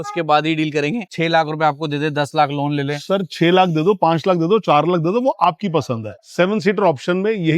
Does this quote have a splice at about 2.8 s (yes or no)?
no